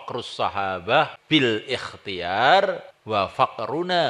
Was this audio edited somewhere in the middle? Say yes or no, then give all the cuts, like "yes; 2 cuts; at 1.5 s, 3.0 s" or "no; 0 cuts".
yes; 2 cuts; at 1.2 s, 2.9 s